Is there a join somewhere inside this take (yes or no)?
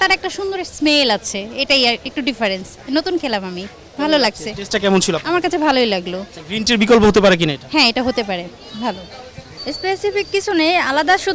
no